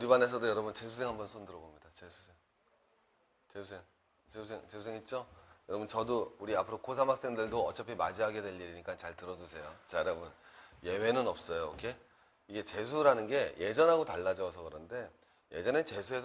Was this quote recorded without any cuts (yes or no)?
yes